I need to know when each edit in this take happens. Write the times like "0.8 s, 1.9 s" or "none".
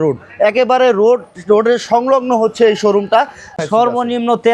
3.6 s